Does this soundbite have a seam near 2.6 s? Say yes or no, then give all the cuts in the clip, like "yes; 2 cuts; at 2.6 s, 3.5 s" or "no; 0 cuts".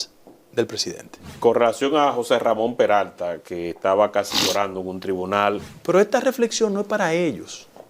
no; 2 cuts; at 1.4 s, 5.7 s